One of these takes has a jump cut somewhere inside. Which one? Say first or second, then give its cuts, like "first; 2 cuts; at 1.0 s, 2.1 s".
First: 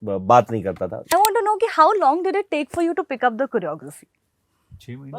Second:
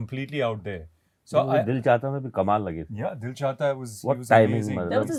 first; 1 cut; at 1.1 s